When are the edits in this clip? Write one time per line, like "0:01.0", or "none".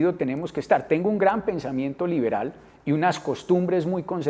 none